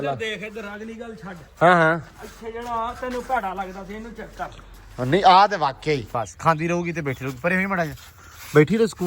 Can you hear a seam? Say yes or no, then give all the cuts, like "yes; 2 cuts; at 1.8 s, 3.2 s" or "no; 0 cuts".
yes; 1 cut; at 6.1 s